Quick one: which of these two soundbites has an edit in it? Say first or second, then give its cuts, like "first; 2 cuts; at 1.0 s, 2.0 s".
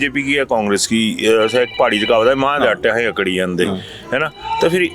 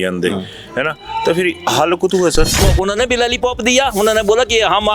second; 1 cut; at 2.6 s